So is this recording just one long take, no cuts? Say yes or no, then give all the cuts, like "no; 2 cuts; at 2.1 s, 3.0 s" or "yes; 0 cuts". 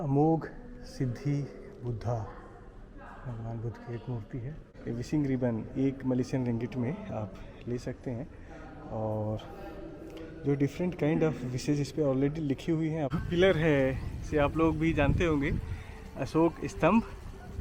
no; 2 cuts; at 4.8 s, 13.1 s